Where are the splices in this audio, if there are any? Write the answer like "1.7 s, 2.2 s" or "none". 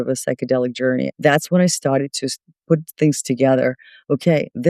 1.1 s